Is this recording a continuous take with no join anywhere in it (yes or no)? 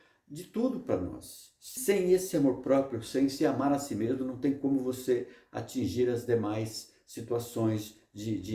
no